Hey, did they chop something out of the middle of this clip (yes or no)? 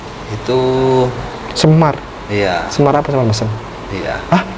no